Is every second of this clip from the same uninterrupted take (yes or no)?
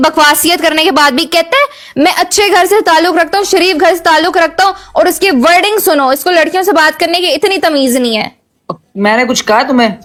yes